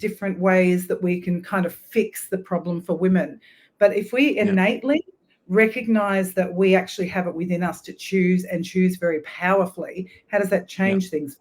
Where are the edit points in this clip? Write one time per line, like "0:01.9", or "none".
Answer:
none